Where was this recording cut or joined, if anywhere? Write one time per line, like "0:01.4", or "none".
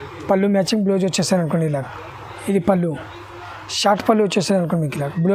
none